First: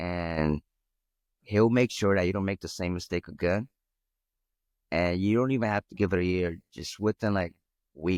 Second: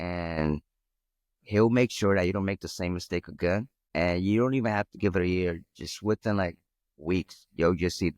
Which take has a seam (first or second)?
second